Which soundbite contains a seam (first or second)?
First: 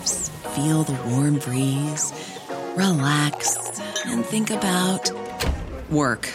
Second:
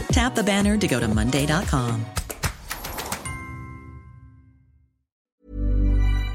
second